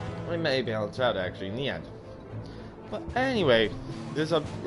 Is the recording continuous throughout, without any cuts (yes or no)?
no